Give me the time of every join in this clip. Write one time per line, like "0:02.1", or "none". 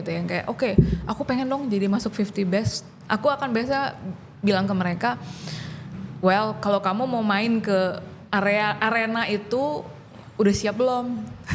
none